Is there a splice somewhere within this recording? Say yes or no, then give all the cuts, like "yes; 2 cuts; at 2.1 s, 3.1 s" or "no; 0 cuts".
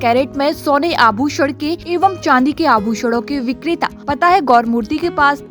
yes; 2 cuts; at 1.8 s, 4.0 s